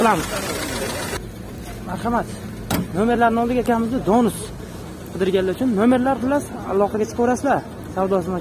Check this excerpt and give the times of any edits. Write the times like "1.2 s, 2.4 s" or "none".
1.2 s